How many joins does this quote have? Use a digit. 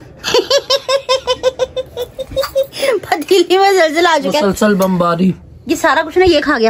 0